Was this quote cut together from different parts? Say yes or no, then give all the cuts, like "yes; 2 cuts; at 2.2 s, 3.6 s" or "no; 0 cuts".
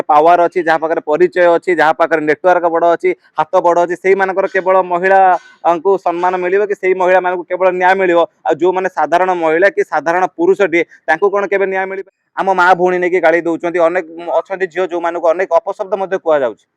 yes; 1 cut; at 12.0 s